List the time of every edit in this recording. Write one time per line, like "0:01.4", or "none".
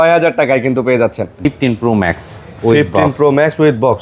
0:01.4